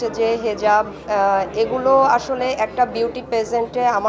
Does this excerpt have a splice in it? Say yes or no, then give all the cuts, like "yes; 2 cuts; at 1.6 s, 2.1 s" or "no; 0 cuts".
no; 0 cuts